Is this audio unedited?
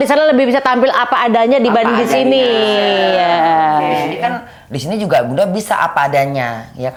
yes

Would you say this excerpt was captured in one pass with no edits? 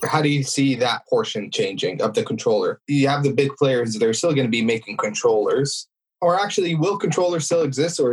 no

